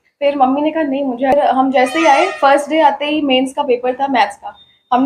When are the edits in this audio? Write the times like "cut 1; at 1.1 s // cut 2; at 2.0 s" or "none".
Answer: cut 1; at 1.3 s